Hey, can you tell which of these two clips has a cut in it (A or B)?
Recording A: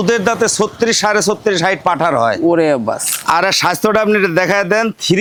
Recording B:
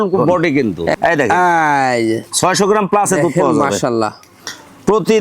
B